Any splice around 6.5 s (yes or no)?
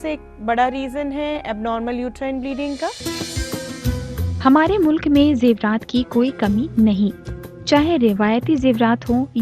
no